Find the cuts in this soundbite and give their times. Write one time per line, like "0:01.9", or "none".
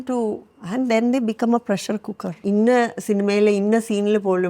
0:02.3